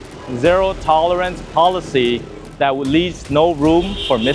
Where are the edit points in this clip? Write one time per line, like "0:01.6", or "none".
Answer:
none